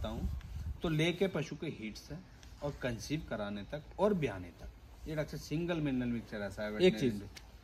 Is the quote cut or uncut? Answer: uncut